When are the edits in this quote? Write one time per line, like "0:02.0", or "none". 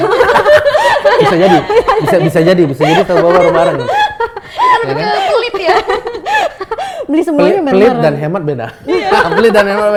none